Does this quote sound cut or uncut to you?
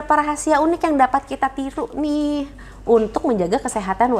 uncut